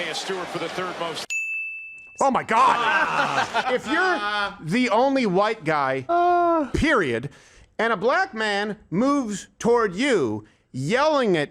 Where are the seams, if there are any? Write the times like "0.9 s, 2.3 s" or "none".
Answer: 3.6 s

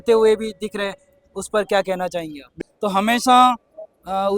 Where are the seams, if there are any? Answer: 2.5 s

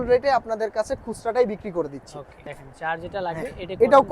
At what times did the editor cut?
2.4 s

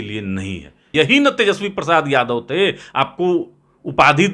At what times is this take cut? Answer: 0.9 s

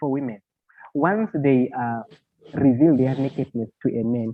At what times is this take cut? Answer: none

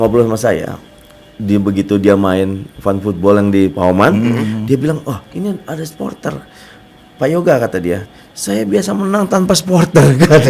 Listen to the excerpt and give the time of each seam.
none

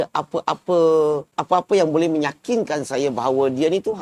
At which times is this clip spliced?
1.4 s

